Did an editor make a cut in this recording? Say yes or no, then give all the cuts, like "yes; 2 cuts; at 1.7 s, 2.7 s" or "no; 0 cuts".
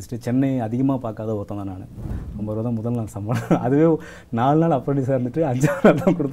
yes; 1 cut; at 2.2 s